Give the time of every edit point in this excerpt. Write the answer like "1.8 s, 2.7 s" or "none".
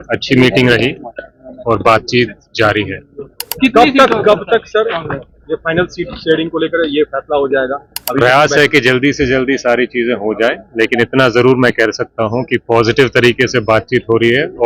none